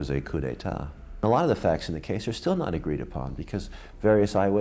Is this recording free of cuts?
no; 1 cut; at 1.2 s

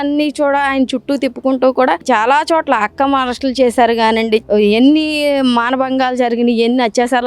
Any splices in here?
yes; 2 cuts; at 2.0 s, 4.4 s

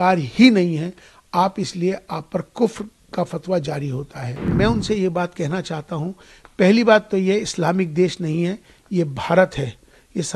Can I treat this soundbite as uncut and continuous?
no; 1 cut; at 4.5 s

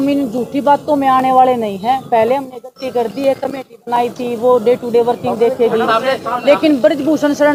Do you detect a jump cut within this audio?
no; 0 cuts

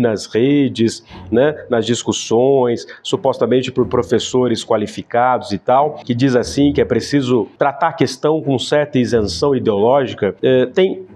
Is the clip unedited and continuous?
yes; 0 cuts

